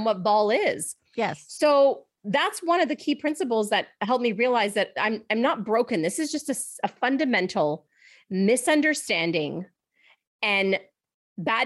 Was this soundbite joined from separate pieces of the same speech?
no; 0 cuts

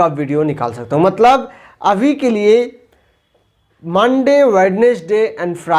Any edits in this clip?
no; 0 cuts

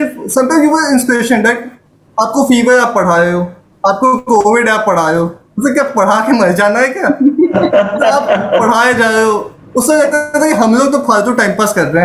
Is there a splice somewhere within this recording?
no; 0 cuts

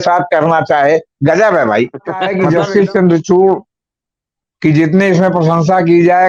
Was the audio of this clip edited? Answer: yes; 1 cut; at 2.3 s

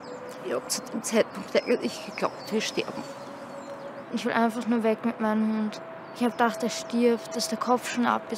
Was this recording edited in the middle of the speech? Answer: yes; 1 cut; at 3.9 s

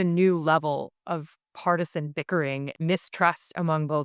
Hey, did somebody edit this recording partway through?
yes; 2 cuts; at 1.0 s, 2.7 s

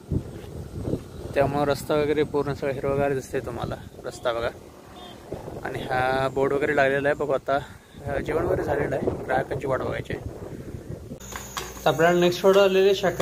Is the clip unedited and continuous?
no; 1 cut; at 11.2 s

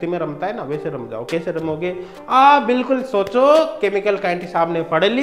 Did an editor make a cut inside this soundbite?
no; 0 cuts

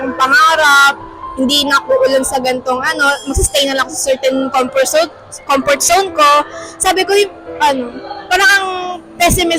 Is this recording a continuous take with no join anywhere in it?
yes; 0 cuts

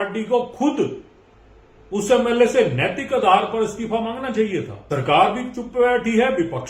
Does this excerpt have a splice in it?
yes; 1 cut; at 4.8 s

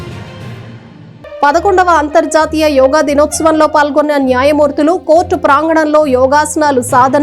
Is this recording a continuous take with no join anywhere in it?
no; 1 cut; at 0.9 s

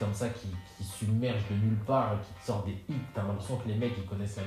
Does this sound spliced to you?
no; 0 cuts

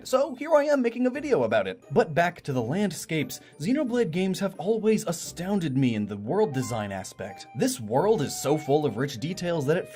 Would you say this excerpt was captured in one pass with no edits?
yes; 0 cuts

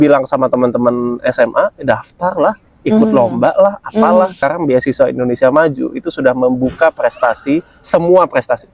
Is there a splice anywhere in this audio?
yes; 1 cut; at 4.4 s

